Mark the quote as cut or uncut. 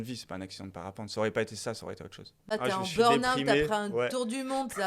cut